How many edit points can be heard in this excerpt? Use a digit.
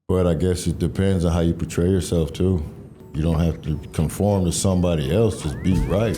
1